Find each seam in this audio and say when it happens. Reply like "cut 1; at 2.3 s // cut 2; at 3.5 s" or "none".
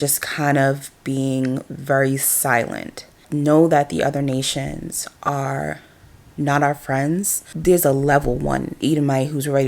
cut 1; at 3.2 s // cut 2; at 7.5 s